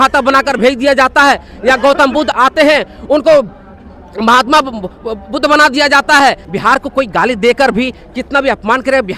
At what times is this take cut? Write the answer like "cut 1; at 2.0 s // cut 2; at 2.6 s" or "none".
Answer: cut 1; at 2.3 s // cut 2; at 6.5 s